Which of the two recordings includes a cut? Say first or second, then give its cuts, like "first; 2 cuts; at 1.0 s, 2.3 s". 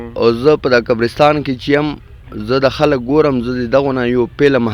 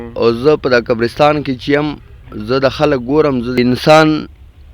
second; 1 cut; at 3.6 s